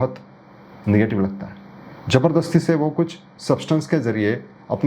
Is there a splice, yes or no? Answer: no